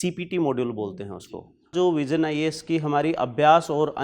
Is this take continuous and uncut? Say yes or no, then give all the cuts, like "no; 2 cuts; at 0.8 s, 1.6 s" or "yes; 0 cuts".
no; 1 cut; at 1.7 s